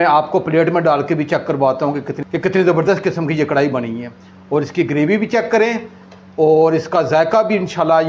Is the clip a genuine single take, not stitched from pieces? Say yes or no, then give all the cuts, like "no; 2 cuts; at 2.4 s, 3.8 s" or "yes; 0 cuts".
yes; 0 cuts